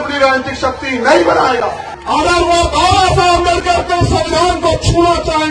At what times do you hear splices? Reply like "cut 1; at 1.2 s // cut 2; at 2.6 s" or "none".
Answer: cut 1; at 1.9 s